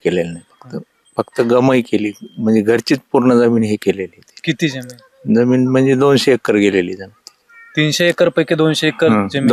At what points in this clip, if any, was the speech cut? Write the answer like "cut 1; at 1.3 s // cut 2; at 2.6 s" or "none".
none